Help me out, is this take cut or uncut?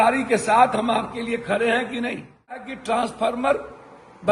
cut